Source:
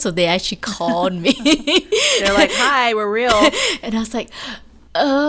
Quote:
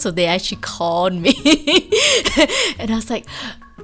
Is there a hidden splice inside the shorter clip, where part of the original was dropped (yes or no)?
yes